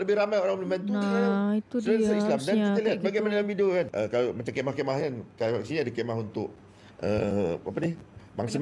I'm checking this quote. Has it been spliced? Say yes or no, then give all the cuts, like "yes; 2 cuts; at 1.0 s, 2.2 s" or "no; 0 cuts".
yes; 1 cut; at 3.9 s